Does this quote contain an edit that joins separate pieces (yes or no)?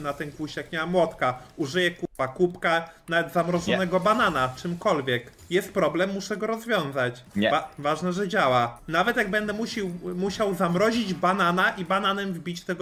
no